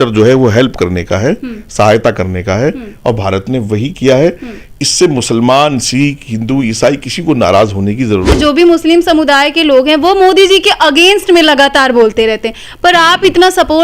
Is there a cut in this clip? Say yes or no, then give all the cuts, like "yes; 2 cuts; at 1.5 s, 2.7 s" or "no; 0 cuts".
yes; 1 cut; at 8.4 s